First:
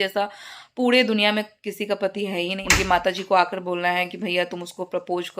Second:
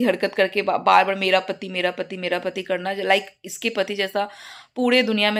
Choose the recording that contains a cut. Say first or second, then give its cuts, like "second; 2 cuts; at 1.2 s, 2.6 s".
first; 1 cut; at 2.6 s